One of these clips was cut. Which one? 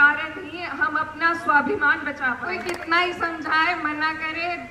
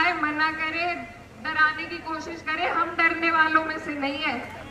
first; 1 cut; at 2.6 s

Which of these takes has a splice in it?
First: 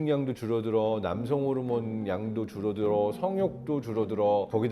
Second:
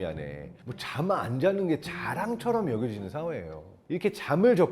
second; 1 cut; at 3.8 s

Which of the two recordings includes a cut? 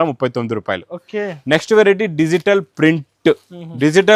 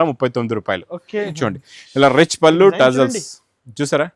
second; 1 cut; at 1.3 s

